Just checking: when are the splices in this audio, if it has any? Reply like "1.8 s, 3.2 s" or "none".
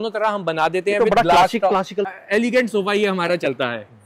2.1 s